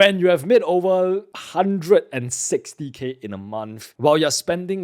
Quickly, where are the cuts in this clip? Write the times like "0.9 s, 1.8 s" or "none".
1.4 s, 3.8 s